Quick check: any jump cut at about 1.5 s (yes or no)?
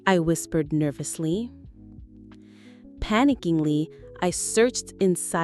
yes